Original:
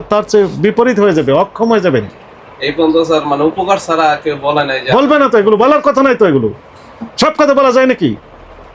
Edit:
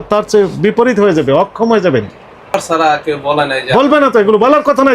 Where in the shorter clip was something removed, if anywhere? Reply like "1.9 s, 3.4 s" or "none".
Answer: 2.6 s